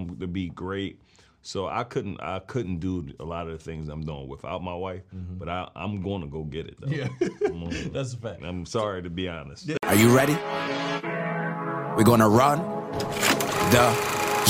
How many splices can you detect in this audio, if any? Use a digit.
1